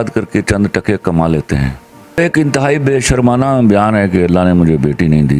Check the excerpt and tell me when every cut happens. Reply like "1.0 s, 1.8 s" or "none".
2.2 s